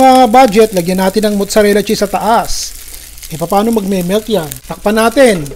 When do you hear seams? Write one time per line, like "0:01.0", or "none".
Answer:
0:04.6